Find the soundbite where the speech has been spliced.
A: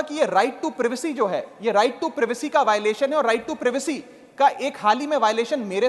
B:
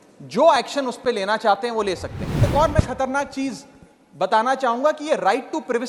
B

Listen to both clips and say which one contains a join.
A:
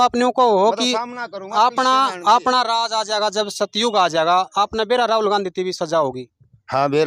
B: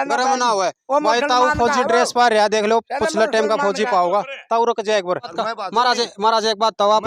B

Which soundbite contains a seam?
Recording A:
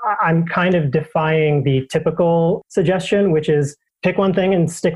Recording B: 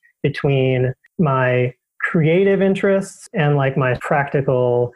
A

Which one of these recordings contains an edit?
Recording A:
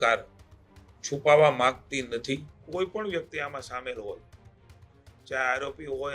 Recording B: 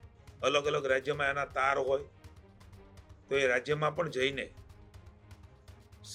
A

